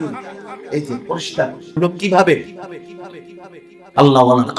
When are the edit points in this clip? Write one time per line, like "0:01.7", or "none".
0:01.8